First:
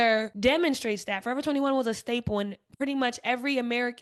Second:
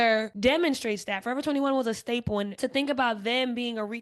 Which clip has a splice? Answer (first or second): second